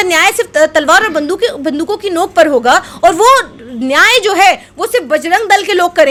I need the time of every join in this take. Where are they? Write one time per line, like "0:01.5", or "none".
none